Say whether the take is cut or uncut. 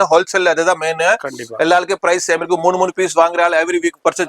uncut